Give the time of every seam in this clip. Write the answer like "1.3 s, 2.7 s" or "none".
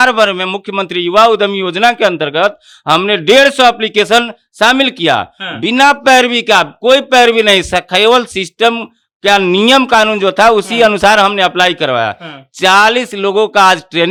none